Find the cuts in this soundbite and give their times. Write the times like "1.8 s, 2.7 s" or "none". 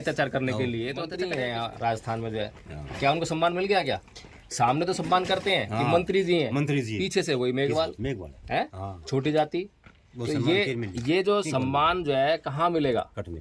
1.1 s